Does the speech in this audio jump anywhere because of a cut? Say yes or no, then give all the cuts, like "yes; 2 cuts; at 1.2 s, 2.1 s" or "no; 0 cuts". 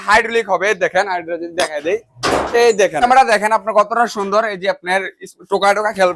yes; 1 cut; at 3.0 s